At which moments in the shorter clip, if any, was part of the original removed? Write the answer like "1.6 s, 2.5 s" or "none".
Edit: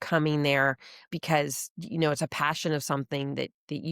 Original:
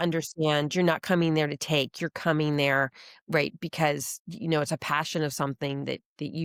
1.1 s

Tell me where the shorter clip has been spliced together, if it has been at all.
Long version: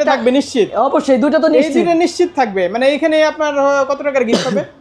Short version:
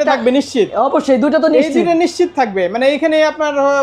none

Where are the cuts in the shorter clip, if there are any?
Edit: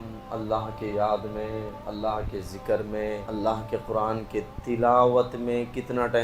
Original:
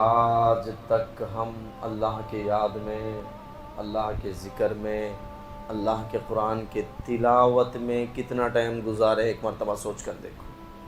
1.8 s, 3.2 s

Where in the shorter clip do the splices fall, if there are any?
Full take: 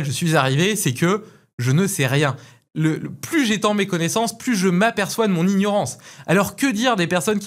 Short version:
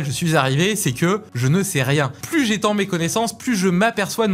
1.3 s, 2.2 s

